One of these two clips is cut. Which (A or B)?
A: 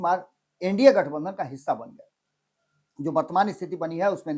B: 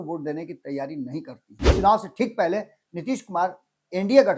B